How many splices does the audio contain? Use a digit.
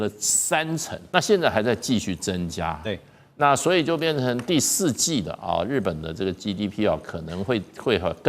1